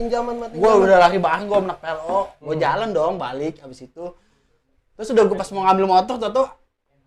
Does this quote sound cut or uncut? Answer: cut